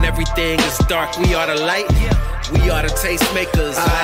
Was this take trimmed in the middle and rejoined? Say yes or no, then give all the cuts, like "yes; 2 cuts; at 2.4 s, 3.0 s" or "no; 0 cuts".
no; 0 cuts